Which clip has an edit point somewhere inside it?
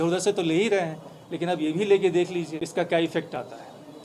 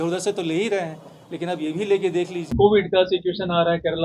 second; 1 cut; at 2.8 s

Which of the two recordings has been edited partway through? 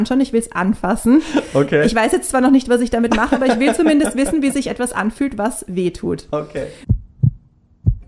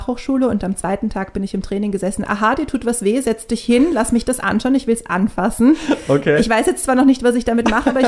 first; 1 cut; at 6.8 s

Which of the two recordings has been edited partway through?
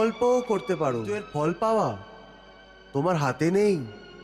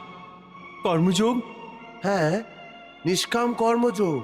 first; 1 cut; at 1.2 s

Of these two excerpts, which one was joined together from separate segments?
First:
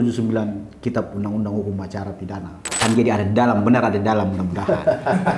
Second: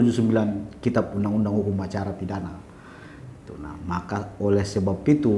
first; 1 cut; at 2.8 s

